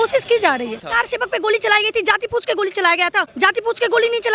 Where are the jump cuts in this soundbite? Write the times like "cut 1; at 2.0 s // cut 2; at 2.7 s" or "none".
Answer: cut 1; at 0.9 s // cut 2; at 3.3 s